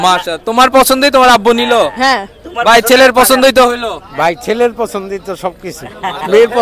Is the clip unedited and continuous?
yes; 0 cuts

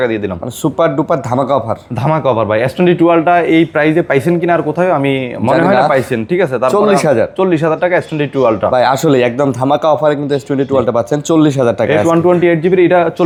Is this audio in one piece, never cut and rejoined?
yes; 0 cuts

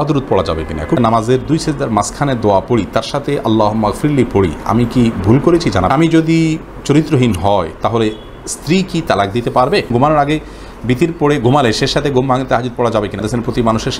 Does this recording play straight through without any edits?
no; 4 cuts; at 1.0 s, 5.9 s, 9.9 s, 13.2 s

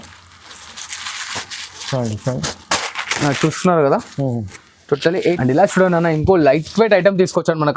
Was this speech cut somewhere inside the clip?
yes; 1 cut; at 5.4 s

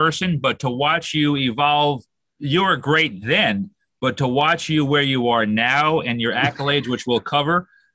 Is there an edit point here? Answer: no; 0 cuts

